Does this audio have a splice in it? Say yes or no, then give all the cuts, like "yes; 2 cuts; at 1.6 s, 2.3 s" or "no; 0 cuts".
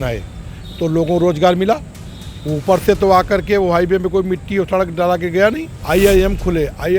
yes; 1 cut; at 5.7 s